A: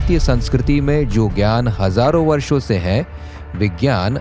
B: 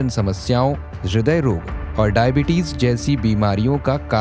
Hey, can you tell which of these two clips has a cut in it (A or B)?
B